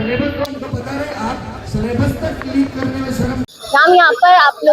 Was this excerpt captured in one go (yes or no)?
yes